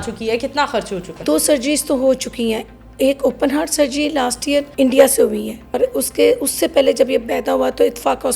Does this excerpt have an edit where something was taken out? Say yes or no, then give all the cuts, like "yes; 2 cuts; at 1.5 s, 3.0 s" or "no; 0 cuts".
yes; 3 cuts; at 1.2 s, 4.7 s, 5.8 s